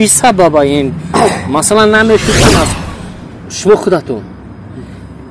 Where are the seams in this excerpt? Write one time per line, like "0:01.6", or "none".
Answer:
0:02.7